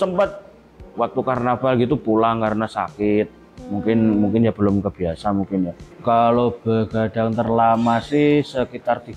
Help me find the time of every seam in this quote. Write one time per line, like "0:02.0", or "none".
0:05.9